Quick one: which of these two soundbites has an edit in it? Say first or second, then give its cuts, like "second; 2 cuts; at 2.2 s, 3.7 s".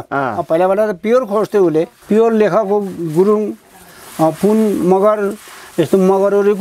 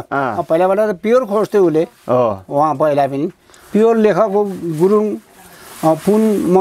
first; 1 cut; at 2.0 s